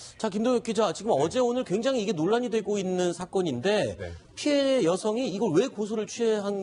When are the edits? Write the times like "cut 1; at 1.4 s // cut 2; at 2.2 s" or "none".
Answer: cut 1; at 2.2 s